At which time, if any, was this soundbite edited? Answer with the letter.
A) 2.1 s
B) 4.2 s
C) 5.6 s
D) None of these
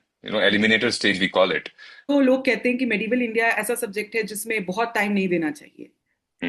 A